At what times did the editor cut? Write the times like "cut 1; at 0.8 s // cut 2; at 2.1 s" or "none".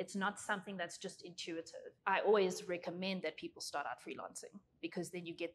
cut 1; at 1.8 s